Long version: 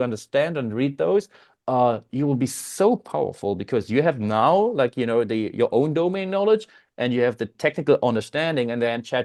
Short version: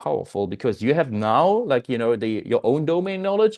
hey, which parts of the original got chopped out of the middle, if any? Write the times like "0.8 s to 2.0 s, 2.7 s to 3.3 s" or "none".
none